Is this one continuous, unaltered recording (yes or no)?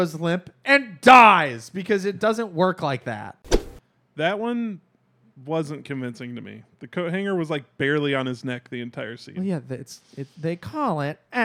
no